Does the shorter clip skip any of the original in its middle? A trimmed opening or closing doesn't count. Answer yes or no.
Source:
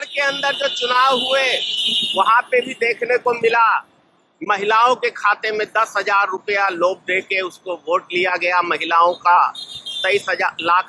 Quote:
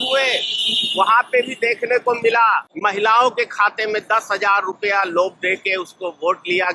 yes